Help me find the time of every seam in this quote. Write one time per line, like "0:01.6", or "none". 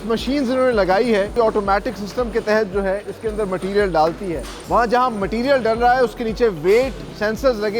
0:01.3
0:04.5

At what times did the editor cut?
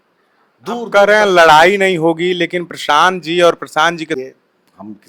0:04.2

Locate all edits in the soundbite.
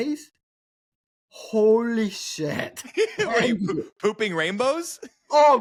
none

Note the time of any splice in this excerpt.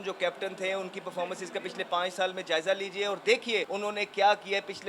0:03.7

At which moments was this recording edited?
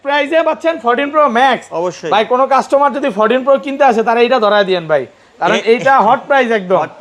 none

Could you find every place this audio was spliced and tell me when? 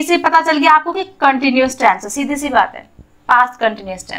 none

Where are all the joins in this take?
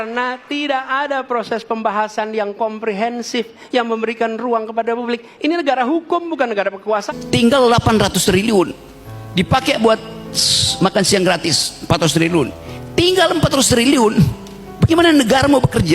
0:07.1

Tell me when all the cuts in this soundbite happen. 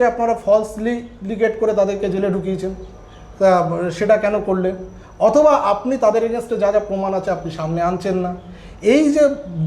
none

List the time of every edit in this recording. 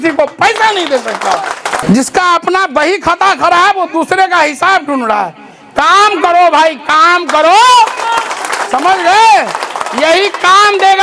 0:01.8

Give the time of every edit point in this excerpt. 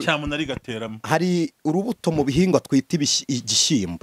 none

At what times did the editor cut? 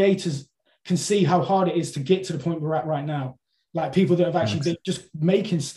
0:04.8

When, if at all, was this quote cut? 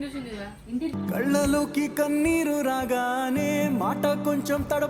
none

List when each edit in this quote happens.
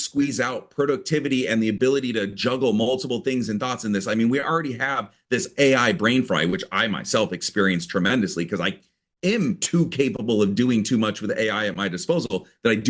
none

